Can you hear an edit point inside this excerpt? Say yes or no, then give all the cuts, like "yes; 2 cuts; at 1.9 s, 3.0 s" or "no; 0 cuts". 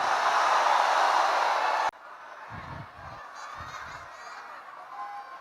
yes; 1 cut; at 1.9 s